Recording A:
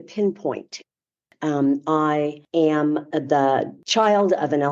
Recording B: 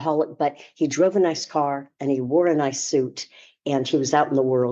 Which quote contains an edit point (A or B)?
A